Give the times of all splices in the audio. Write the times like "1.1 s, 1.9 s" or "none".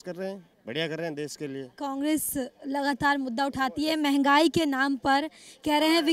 none